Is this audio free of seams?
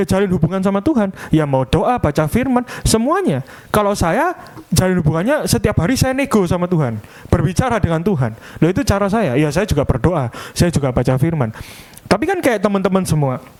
yes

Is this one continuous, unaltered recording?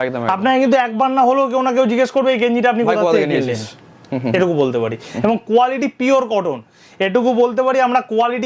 yes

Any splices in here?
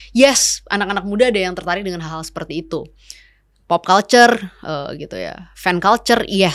no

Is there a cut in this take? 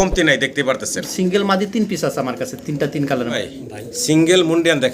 yes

